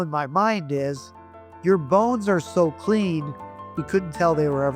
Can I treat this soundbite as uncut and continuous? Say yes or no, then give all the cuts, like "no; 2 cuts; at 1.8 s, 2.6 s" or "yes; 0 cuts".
yes; 0 cuts